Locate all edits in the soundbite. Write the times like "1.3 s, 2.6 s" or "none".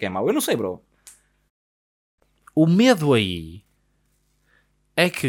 1.8 s